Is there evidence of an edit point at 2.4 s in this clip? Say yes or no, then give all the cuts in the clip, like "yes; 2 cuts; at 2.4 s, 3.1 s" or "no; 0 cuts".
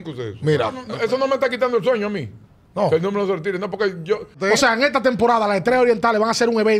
no; 2 cuts; at 0.9 s, 4.4 s